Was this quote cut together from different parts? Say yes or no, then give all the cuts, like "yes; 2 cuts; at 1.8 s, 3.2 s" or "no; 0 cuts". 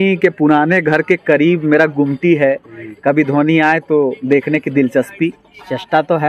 no; 0 cuts